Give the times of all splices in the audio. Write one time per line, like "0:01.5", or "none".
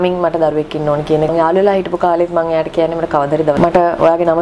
0:01.3
0:03.6